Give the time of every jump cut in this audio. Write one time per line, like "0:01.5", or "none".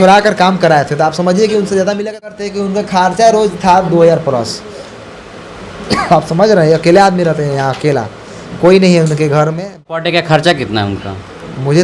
0:02.4
0:09.9